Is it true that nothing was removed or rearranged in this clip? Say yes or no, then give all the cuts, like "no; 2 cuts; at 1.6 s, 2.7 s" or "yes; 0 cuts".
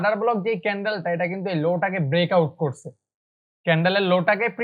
yes; 0 cuts